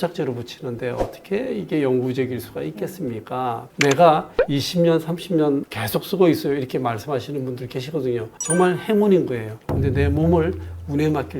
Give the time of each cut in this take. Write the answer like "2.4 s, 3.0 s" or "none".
3.7 s, 9.6 s